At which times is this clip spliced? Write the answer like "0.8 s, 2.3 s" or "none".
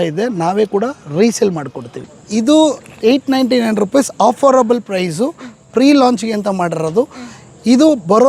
1.9 s